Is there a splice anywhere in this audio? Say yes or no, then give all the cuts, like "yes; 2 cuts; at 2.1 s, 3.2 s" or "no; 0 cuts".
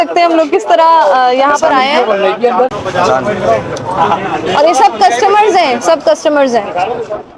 no; 0 cuts